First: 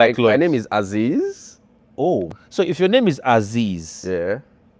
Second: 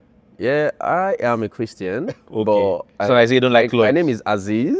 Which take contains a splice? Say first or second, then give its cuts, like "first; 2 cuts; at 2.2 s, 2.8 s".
first; 1 cut; at 2.3 s